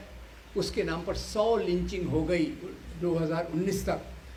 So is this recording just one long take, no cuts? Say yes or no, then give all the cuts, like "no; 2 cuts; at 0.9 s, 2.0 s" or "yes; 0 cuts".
yes; 0 cuts